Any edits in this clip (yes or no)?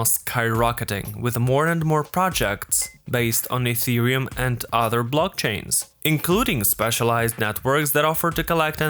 no